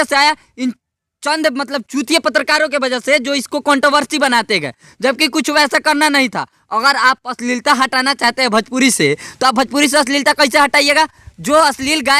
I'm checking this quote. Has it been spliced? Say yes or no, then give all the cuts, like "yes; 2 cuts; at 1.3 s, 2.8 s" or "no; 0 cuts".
no; 0 cuts